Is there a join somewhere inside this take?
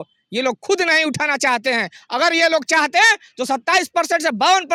no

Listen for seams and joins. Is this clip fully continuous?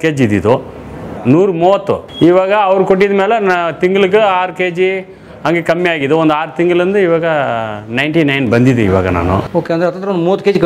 no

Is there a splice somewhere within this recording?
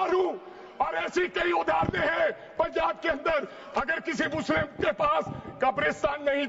no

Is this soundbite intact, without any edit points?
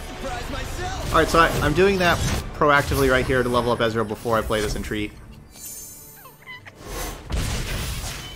yes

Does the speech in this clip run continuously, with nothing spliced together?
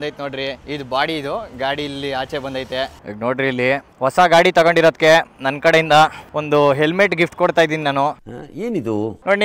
yes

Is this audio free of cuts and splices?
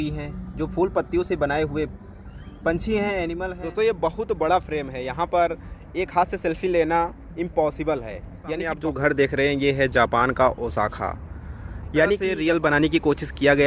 no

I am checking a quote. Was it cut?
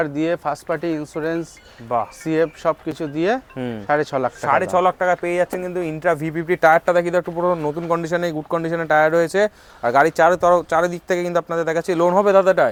no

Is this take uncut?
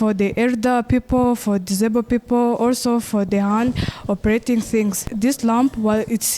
no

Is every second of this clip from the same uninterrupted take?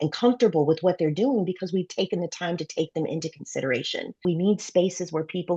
no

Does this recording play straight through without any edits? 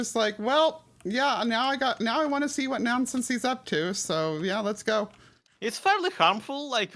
yes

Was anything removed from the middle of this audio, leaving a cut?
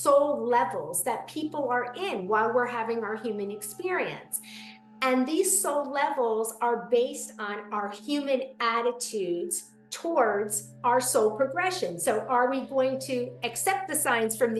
no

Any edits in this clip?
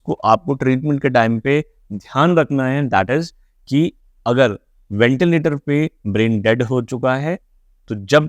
no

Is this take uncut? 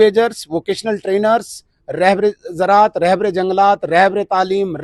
yes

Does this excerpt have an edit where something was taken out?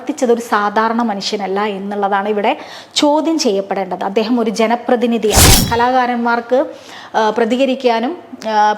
yes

